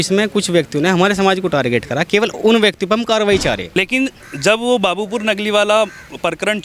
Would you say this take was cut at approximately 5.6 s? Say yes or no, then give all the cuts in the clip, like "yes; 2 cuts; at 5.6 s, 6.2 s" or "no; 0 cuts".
no; 1 cut; at 3.7 s